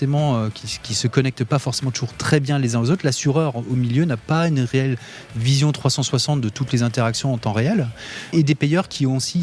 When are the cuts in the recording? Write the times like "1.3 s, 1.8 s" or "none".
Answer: 8.3 s